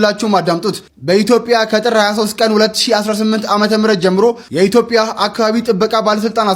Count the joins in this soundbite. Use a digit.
1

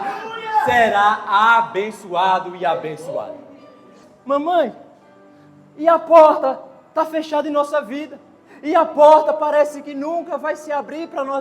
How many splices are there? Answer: 1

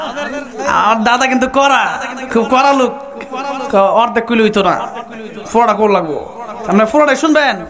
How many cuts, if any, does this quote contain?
0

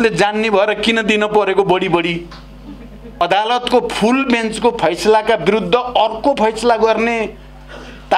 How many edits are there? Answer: 1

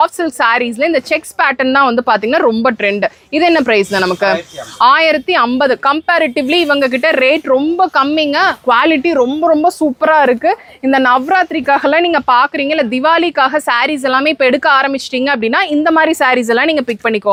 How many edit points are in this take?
0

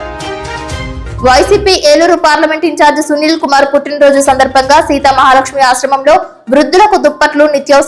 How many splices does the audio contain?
1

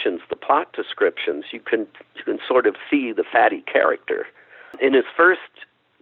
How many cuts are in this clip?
1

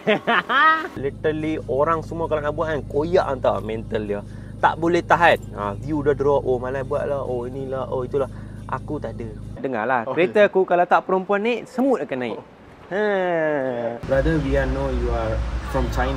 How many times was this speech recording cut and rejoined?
3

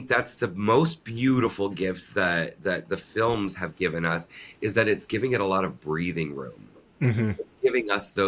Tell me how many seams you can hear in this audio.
0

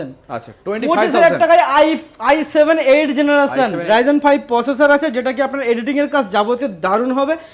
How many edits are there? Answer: 1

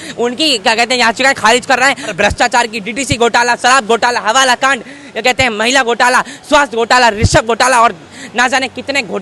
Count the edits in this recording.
1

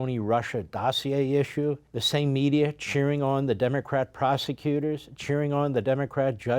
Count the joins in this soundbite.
1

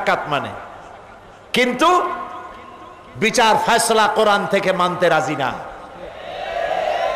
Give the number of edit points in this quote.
0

